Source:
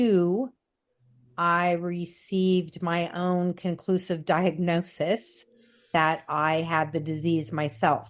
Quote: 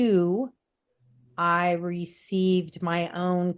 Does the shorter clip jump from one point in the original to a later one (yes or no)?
no